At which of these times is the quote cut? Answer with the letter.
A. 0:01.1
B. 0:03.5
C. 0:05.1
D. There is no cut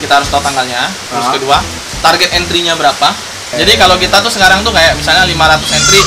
B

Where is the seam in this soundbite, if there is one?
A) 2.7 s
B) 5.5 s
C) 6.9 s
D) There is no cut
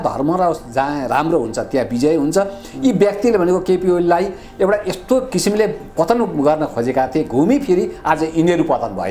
D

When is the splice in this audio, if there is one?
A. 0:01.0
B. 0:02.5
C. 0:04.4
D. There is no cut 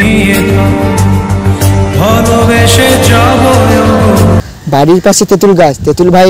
C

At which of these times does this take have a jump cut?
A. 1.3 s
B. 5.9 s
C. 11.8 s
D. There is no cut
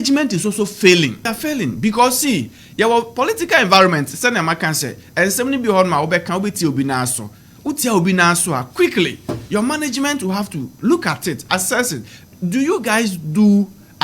A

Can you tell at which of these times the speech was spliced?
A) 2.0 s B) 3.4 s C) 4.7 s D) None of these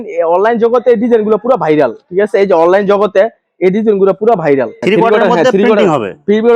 C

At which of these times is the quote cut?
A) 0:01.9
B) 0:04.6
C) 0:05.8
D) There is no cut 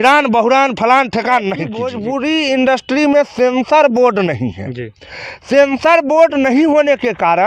A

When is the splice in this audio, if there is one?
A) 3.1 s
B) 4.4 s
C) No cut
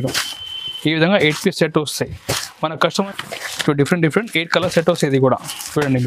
A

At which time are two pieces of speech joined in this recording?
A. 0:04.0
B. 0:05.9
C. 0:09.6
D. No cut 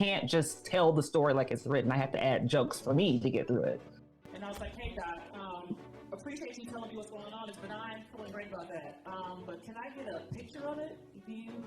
A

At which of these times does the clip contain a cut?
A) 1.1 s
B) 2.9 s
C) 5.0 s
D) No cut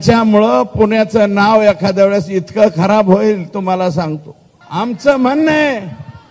C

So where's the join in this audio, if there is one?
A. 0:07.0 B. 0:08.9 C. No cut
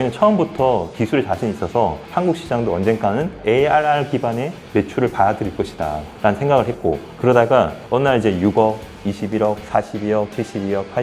A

